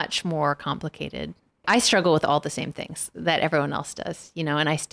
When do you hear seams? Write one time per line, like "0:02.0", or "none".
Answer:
0:01.6